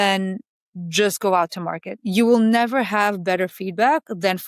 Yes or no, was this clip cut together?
no